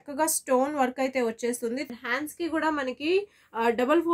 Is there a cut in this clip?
yes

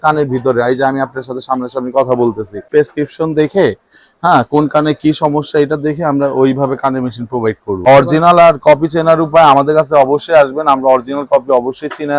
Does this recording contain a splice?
yes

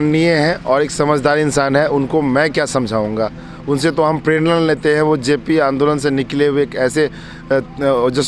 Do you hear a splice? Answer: no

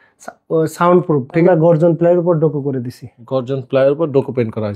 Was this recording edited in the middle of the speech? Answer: yes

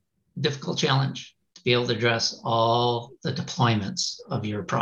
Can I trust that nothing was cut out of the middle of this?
yes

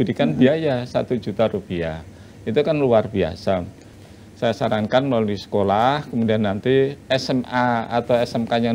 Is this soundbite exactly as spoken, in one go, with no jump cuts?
no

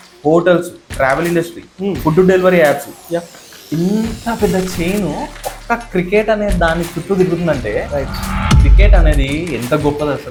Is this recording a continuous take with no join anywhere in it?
yes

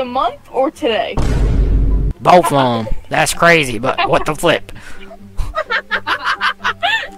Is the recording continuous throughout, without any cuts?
yes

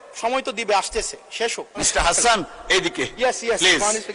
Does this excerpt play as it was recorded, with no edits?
no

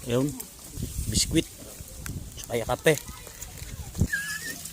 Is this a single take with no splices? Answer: no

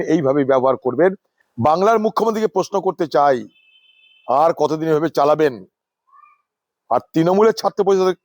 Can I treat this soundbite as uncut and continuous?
no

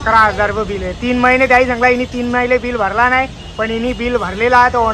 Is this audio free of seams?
yes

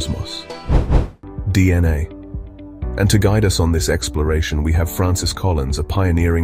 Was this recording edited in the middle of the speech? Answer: yes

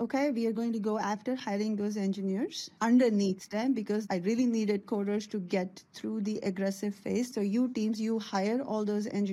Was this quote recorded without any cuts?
no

